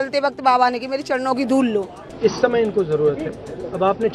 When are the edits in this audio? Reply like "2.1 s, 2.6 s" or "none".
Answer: 2.0 s

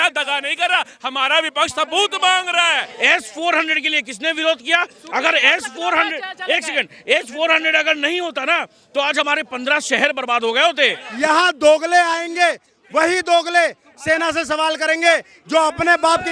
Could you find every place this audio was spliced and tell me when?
2.9 s, 11.0 s

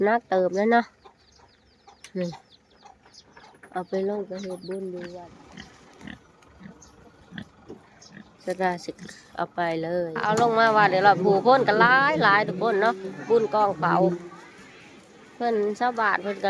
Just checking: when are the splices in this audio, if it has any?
5.2 s, 10.1 s

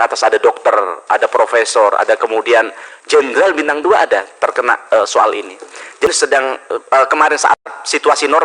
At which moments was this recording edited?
6.1 s

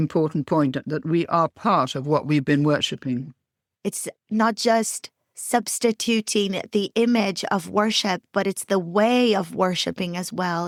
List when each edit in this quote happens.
none

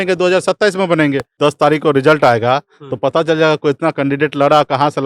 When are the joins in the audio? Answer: 1.3 s

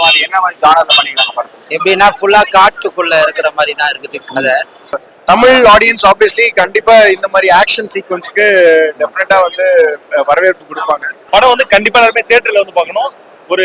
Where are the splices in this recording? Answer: 5.0 s, 11.2 s

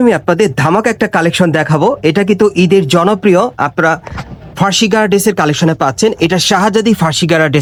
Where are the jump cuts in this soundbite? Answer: none

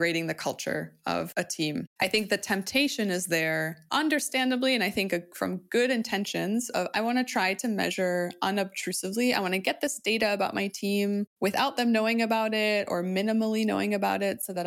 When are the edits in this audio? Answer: 1.9 s

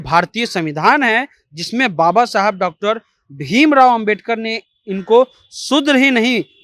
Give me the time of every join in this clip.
none

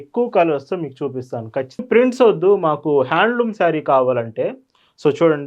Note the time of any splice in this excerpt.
1.8 s

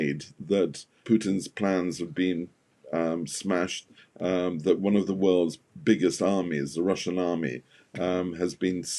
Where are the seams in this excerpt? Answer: 1.0 s

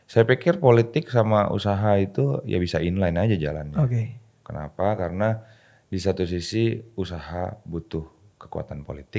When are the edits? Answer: none

